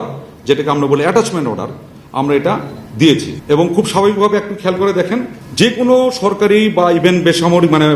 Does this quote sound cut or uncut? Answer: cut